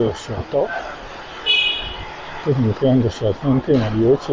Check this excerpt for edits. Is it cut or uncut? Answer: uncut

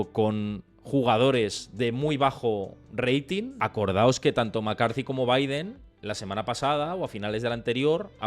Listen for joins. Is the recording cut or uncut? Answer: cut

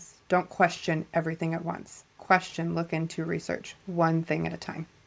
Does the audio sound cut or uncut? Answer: uncut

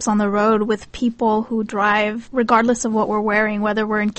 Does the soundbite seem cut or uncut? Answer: cut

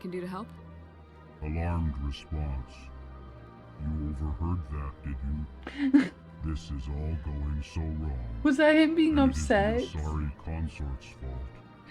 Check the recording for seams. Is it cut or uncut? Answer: uncut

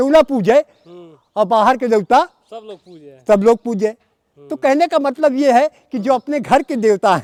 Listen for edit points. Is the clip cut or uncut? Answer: uncut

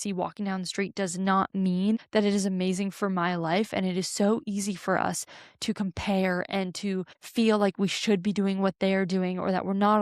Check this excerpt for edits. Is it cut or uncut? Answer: cut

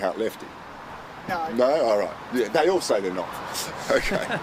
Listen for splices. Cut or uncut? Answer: uncut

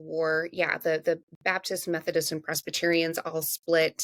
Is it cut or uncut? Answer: uncut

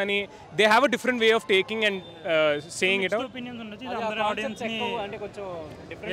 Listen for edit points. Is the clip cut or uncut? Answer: uncut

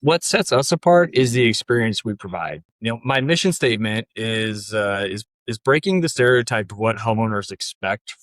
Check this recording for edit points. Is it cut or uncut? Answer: cut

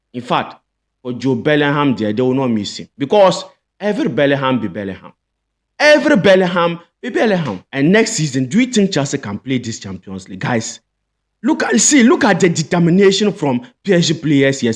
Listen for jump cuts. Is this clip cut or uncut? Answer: cut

